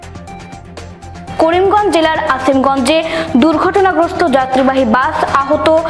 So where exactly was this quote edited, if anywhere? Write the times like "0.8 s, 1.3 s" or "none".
1.2 s